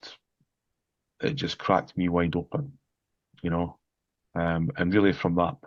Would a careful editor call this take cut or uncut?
uncut